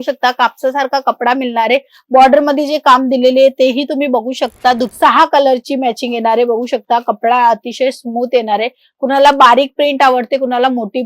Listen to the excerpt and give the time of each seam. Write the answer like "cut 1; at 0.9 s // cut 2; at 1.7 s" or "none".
cut 1; at 4.9 s